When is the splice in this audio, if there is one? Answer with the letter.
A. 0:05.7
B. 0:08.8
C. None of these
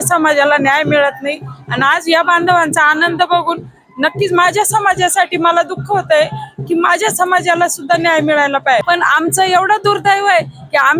B